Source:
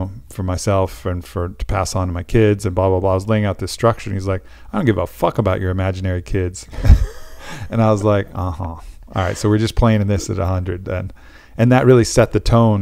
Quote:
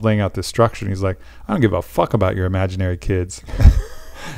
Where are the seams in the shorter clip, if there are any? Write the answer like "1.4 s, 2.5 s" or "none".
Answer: none